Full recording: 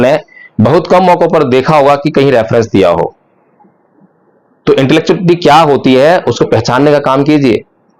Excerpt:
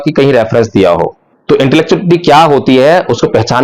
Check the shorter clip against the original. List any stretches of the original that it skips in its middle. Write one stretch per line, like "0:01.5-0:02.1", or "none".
0:03.3-0:04.4